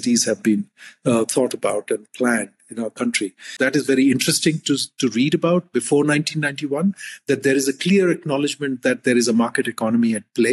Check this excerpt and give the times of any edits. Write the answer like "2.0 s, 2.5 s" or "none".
3.6 s